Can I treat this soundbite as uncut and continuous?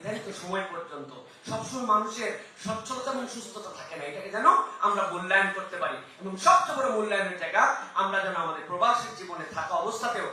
yes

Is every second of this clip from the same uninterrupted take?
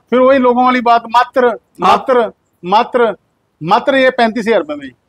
yes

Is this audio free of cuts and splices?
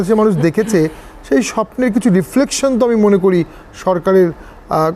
yes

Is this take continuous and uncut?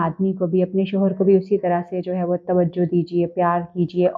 yes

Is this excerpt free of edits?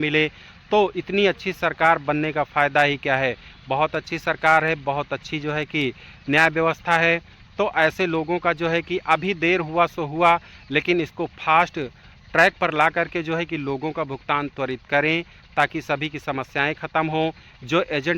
yes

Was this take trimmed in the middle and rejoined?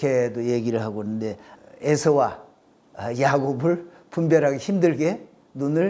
yes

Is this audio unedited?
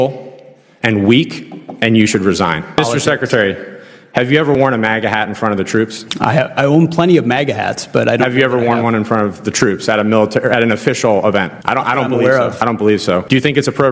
no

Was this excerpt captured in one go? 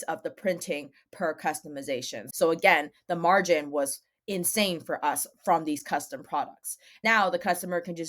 no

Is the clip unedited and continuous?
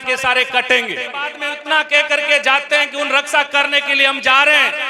no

